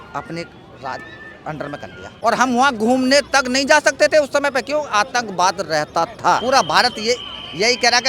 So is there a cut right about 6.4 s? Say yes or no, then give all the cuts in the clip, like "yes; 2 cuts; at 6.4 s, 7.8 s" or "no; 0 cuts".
yes; 2 cuts; at 2.1 s, 6.4 s